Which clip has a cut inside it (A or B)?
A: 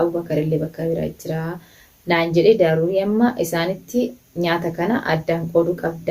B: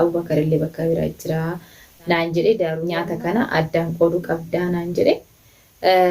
B